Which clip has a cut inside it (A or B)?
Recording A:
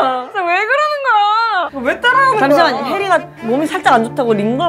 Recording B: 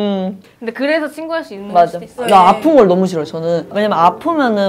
B